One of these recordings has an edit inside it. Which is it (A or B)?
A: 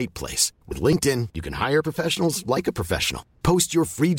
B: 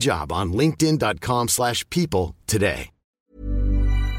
B